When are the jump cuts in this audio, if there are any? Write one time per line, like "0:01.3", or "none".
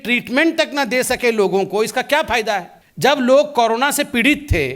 0:02.8